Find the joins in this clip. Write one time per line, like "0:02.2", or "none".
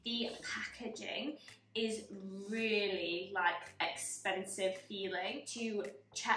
0:05.5